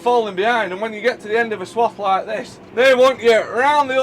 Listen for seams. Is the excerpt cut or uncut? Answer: cut